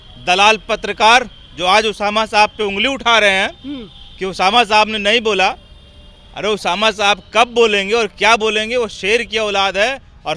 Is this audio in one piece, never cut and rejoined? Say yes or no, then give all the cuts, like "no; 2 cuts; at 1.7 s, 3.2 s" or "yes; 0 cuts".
yes; 0 cuts